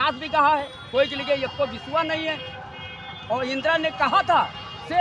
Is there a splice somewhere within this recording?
no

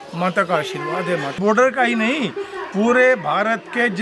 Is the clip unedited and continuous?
no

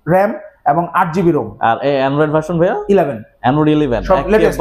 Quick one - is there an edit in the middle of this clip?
no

